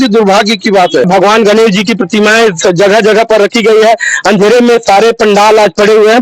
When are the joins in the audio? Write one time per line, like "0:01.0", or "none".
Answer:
0:01.1

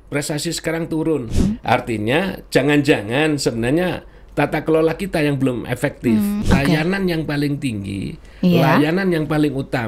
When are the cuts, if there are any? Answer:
0:01.3
0:06.4

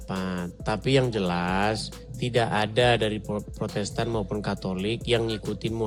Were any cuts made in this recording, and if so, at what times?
none

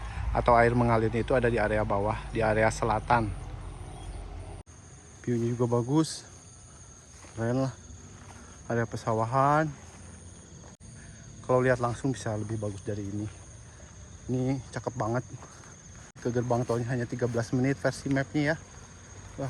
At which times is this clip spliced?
0:04.7
0:10.7
0:16.2

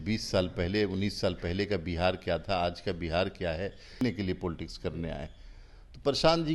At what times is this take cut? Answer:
0:04.0

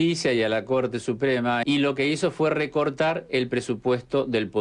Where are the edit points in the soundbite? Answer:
0:01.6

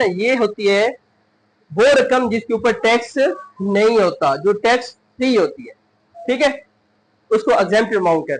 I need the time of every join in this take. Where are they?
none

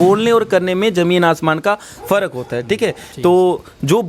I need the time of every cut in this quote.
none

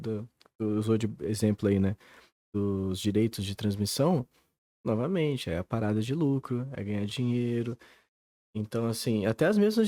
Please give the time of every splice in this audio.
none

